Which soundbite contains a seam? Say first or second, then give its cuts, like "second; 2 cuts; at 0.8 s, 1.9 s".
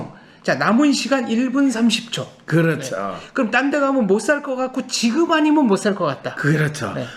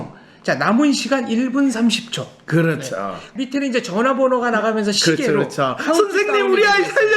second; 1 cut; at 3.2 s